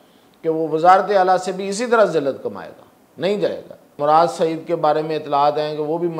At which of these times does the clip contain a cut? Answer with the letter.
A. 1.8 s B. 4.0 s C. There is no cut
B